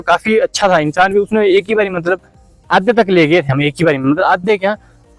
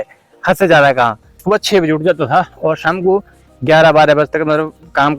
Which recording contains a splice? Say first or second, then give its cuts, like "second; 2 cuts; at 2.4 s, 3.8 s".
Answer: second; 1 cut; at 1.4 s